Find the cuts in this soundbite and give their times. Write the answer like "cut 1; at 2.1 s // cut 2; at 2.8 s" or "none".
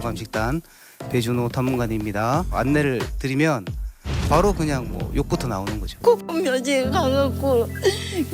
cut 1; at 6.0 s